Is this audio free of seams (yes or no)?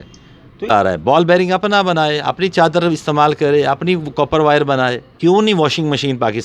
no